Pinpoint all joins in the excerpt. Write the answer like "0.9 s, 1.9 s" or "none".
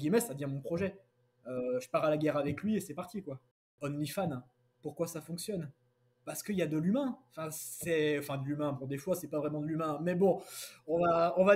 3.7 s